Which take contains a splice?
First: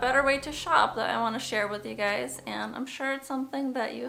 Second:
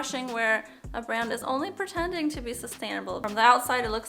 second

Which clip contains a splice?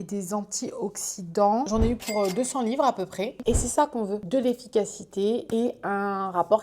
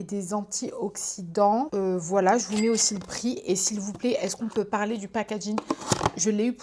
first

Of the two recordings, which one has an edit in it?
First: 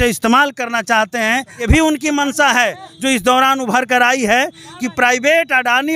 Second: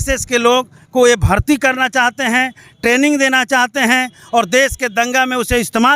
first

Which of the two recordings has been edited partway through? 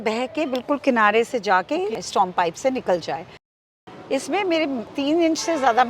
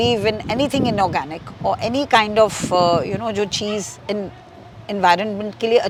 first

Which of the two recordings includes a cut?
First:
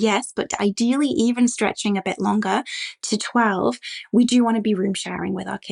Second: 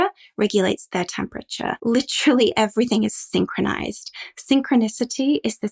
second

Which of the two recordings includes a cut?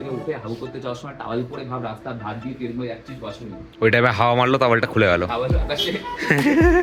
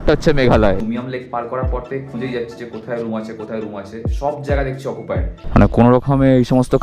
second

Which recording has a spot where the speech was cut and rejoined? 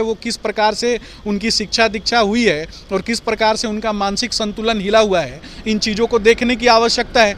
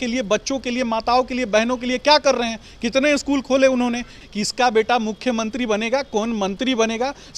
second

